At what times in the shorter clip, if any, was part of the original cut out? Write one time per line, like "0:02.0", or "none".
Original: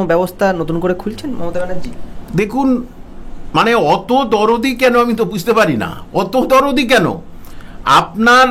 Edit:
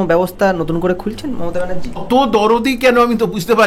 0:02.0